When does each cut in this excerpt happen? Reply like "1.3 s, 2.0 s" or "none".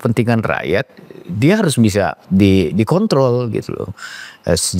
2.2 s